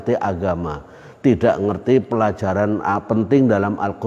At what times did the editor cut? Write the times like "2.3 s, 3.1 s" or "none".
none